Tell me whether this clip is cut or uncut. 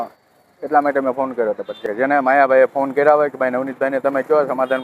cut